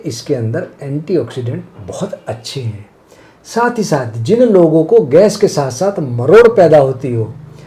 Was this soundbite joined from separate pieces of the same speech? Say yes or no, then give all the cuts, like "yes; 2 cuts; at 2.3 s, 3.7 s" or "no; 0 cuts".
no; 0 cuts